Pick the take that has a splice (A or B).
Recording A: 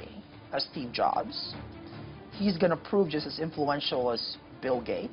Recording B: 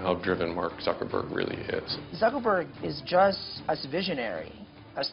B